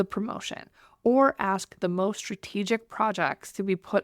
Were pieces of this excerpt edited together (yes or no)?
no